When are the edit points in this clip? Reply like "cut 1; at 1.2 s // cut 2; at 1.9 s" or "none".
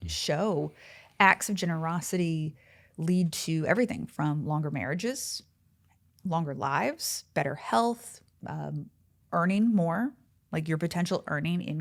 none